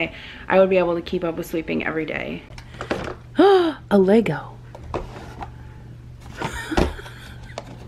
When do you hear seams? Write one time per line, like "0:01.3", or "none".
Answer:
0:02.5